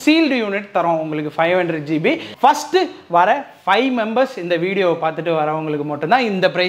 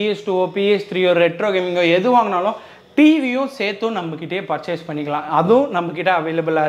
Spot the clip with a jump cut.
first; 1 cut; at 2.3 s

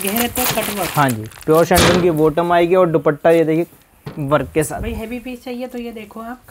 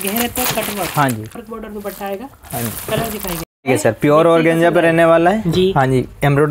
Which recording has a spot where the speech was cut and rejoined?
second; 2 cuts; at 1.3 s, 3.5 s

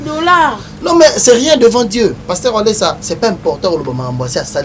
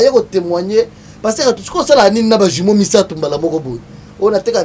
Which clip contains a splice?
first; 2 cuts; at 2.2 s, 3.0 s

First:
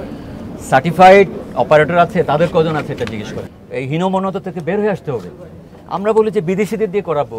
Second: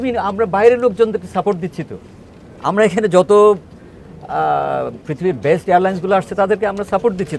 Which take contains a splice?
first; 1 cut; at 3.4 s

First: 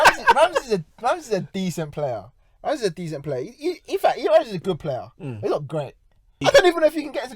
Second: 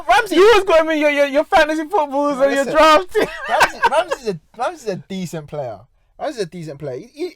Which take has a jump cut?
first; 1 cut; at 6.3 s

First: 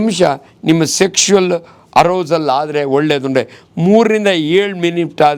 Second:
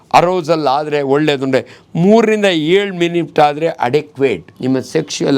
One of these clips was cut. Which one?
second; 1 cut; at 4.5 s

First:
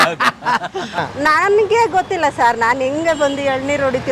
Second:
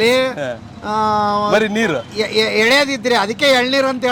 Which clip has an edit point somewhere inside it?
first; 1 cut; at 1.1 s

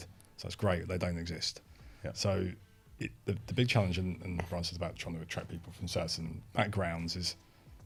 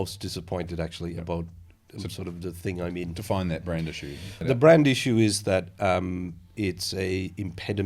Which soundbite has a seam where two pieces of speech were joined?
second; 1 cut; at 4.4 s

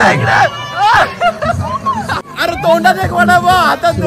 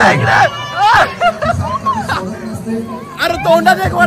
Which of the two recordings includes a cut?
first; 1 cut; at 2.3 s

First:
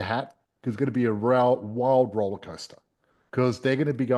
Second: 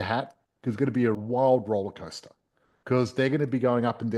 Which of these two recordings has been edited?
second; 1 cut; at 1.2 s

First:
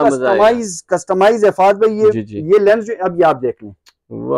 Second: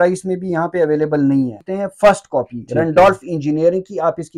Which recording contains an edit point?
second; 1 cut; at 1.6 s

